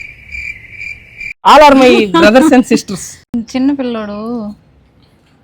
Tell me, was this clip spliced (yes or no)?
no